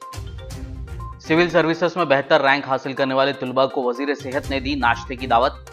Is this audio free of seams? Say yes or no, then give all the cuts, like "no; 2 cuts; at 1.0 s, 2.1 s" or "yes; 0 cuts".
no; 1 cut; at 1.2 s